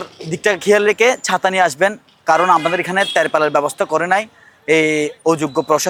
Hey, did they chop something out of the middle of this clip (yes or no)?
no